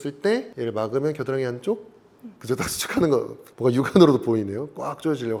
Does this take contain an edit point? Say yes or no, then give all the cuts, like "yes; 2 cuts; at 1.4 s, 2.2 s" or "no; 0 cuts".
no; 0 cuts